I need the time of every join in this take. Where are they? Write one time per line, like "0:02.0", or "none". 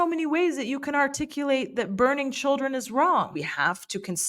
0:03.4

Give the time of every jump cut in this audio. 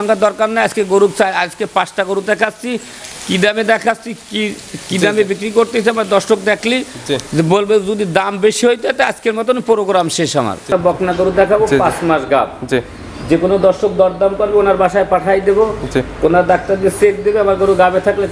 0:10.7

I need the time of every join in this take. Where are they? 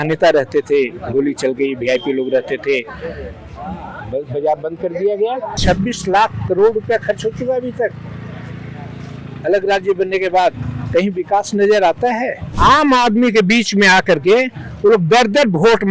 0:05.5
0:12.4

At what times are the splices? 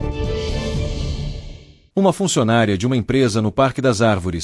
none

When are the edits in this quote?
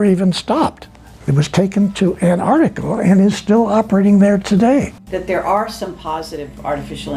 0:05.0

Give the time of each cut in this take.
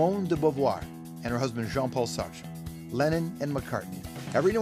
none

